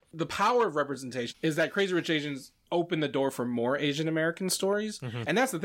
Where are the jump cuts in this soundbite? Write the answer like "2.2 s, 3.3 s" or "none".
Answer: none